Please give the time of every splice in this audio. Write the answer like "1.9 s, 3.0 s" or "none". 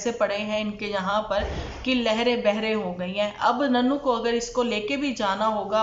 none